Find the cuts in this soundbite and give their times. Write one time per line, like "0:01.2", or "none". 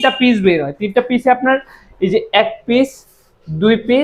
none